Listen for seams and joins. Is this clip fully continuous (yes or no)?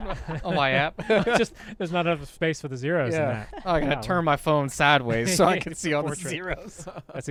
yes